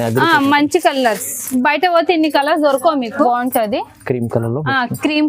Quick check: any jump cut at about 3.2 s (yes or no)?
yes